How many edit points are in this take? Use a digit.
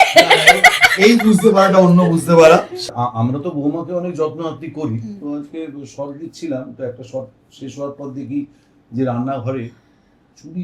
1